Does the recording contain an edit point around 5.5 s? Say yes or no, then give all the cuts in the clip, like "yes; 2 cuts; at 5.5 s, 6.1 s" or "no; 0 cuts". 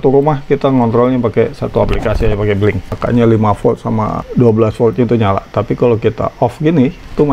no; 1 cut; at 2.9 s